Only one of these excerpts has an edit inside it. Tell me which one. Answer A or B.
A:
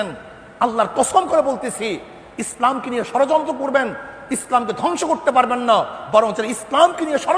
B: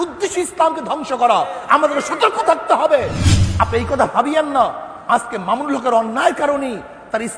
B